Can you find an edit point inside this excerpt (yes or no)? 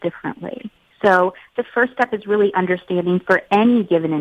no